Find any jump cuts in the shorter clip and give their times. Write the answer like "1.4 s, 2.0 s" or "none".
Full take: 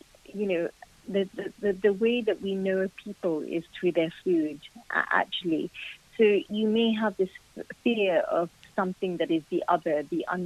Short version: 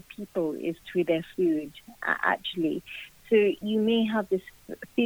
none